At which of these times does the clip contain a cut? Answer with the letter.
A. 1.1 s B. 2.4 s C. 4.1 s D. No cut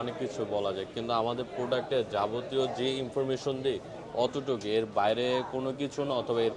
D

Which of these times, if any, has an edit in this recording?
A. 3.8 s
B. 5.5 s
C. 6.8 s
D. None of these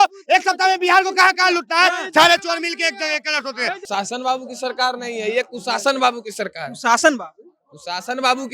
A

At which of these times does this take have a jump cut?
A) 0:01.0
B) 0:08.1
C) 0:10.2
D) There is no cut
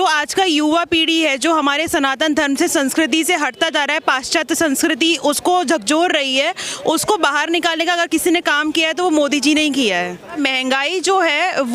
C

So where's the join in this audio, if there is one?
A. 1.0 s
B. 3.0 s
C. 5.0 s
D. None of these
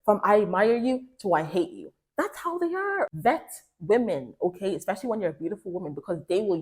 B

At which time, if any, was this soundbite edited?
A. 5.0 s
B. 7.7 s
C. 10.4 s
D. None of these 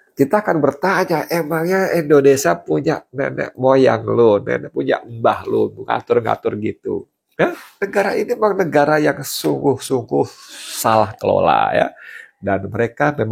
B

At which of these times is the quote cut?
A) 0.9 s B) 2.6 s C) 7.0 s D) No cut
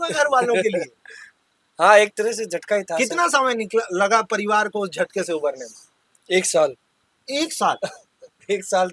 D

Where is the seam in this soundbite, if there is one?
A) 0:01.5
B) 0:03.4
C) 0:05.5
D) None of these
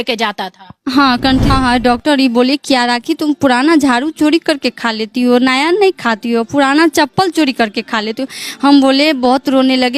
A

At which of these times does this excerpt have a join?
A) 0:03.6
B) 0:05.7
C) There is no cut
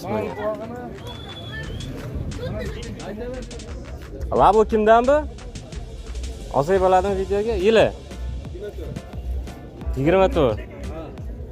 A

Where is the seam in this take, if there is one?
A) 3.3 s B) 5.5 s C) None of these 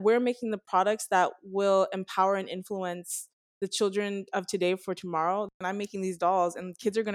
B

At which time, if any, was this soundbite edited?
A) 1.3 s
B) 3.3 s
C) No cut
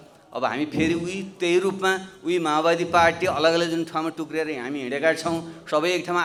C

